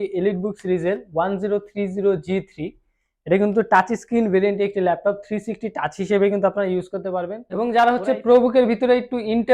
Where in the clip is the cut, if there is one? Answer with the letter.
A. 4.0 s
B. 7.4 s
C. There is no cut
B